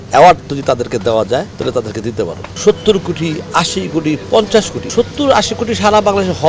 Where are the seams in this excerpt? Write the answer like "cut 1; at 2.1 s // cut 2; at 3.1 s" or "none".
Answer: cut 1; at 1.5 s // cut 2; at 2.5 s // cut 3; at 4.8 s